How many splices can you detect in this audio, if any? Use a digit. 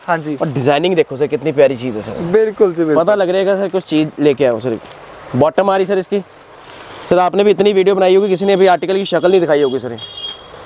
0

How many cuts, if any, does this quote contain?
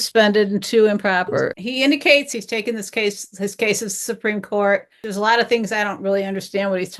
3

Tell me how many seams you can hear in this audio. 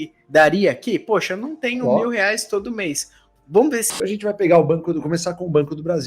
1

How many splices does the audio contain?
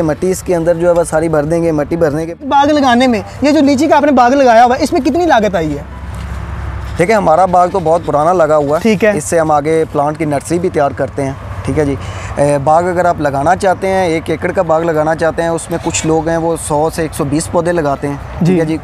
1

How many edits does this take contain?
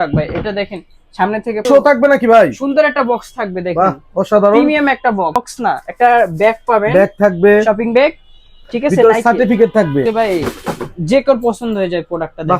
1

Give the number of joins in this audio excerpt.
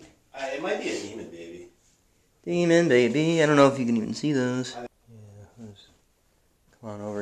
1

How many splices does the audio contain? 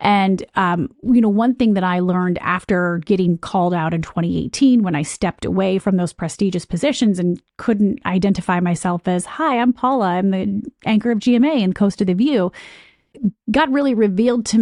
1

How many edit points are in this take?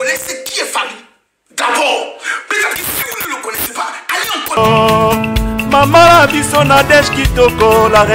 1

